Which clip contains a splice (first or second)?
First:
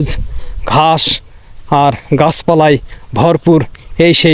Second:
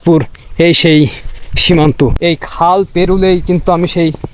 second